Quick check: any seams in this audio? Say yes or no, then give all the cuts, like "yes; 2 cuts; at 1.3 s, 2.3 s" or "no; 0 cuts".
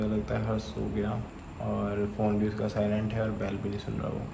no; 0 cuts